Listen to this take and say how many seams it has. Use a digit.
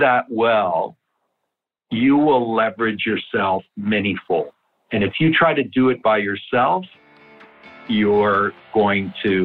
0